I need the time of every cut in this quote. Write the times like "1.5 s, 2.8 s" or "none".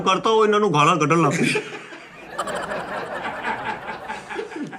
none